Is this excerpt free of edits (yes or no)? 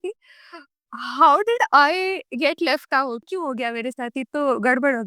no